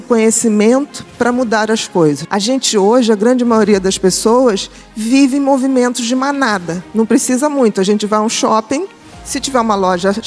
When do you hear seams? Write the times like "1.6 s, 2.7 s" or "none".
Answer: 2.2 s, 6.8 s